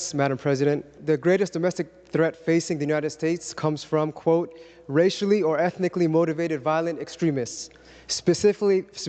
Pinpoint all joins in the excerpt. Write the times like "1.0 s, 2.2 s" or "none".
0.9 s